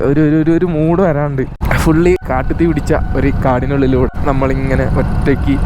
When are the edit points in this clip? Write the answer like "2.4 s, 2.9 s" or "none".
1.6 s, 2.2 s, 4.2 s